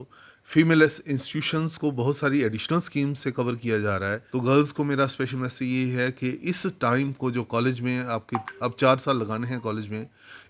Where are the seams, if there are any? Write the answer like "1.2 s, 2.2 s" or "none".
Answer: 4.2 s